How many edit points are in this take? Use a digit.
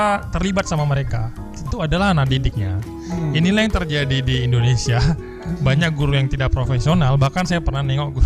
1